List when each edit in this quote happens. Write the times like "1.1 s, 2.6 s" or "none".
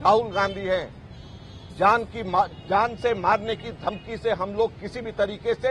none